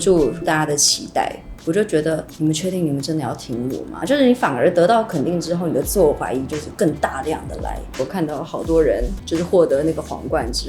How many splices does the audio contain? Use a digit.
2